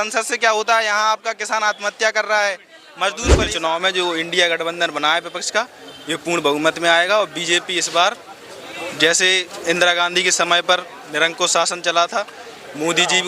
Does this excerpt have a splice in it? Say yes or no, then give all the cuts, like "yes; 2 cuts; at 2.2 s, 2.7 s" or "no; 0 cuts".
yes; 1 cut; at 3.5 s